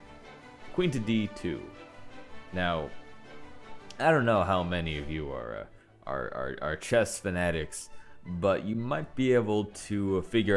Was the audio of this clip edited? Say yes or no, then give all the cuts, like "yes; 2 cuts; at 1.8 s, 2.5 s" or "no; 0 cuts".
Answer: no; 0 cuts